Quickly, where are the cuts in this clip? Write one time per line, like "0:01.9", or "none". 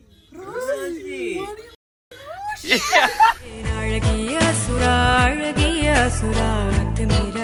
none